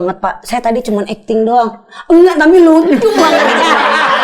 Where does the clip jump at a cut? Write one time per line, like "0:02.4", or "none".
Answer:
none

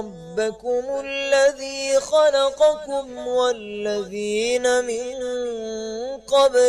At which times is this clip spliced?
0:03.9

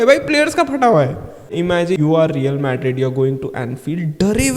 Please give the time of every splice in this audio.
none

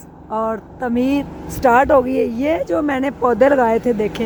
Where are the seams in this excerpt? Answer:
none

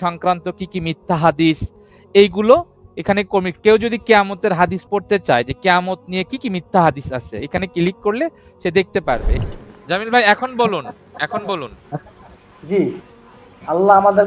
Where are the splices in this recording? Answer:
0:09.3

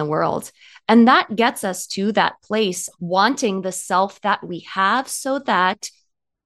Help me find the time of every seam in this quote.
0:02.9

